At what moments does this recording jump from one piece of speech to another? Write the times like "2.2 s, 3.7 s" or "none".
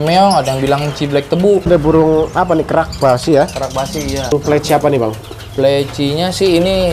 1.7 s, 4.3 s